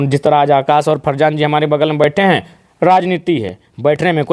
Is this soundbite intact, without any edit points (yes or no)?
yes